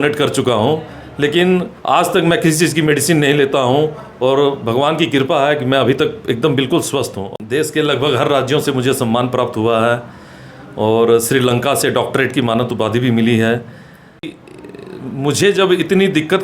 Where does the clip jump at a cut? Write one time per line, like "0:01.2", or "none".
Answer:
0:07.2
0:14.4

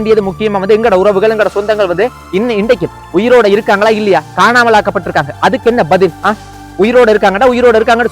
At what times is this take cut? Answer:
0:02.2

